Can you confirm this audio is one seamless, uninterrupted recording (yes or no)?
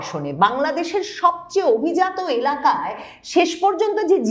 yes